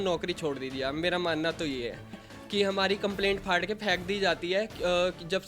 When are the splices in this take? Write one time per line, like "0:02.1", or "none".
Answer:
0:02.3